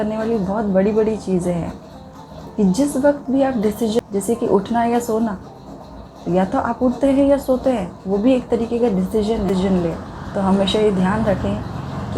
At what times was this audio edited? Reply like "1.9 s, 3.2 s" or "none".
4.0 s, 9.5 s

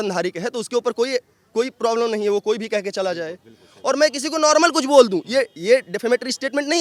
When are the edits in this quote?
none

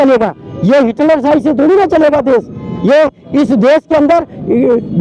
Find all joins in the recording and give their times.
none

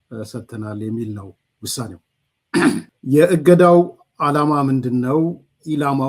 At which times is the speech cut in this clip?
2.9 s

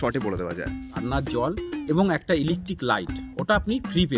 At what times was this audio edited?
1.0 s

